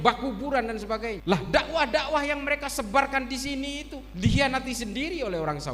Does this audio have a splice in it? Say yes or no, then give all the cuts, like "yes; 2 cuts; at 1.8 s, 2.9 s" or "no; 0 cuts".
yes; 1 cut; at 1.2 s